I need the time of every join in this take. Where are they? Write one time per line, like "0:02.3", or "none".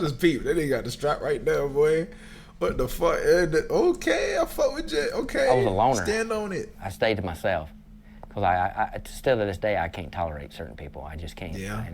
none